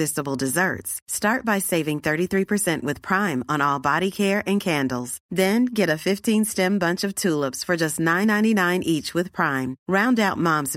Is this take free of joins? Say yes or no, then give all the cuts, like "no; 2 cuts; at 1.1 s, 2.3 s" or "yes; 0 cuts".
yes; 0 cuts